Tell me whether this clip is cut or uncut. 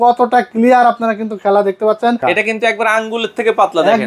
cut